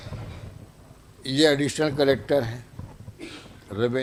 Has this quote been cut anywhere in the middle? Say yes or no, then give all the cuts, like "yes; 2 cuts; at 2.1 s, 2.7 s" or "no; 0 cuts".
no; 0 cuts